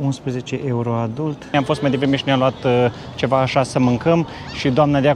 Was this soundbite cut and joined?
yes; 1 cut; at 1.5 s

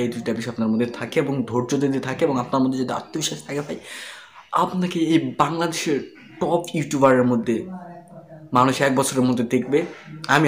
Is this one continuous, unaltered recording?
yes; 0 cuts

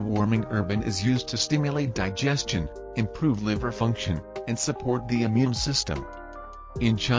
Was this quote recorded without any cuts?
yes; 0 cuts

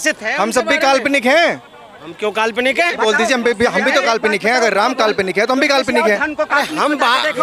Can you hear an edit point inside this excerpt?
no; 0 cuts

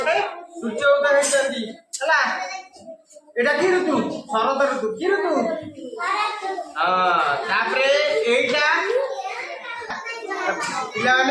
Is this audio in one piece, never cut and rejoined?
no; 1 cut; at 10.0 s

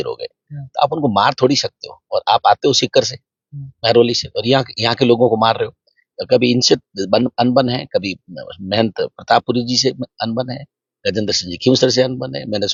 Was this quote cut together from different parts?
no; 0 cuts

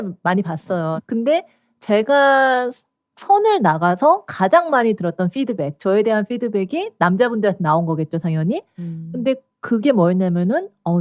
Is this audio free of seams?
no; 1 cut; at 0.9 s

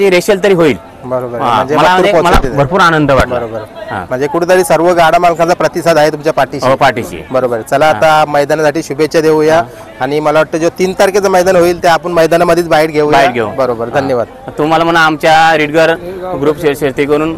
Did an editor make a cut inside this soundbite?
no; 0 cuts

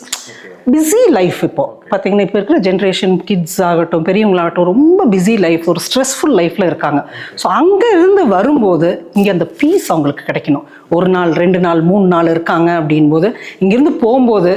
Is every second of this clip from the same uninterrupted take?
yes; 0 cuts

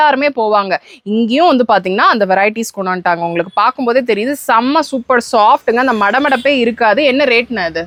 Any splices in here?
no; 0 cuts

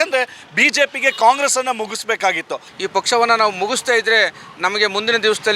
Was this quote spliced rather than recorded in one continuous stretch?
yes; 1 cut; at 2.7 s

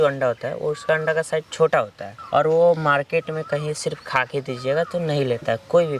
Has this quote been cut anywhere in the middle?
no; 0 cuts

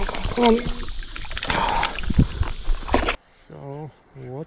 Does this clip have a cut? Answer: yes; 1 cut; at 3.1 s

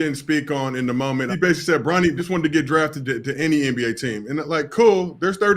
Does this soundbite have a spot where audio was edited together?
yes; 2 cuts; at 1.3 s, 2.2 s

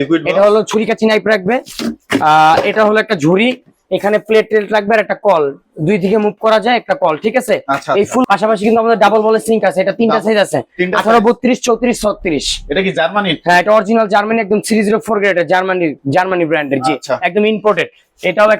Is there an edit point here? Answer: yes; 1 cut; at 8.3 s

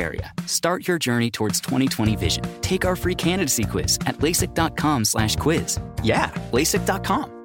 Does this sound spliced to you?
no; 0 cuts

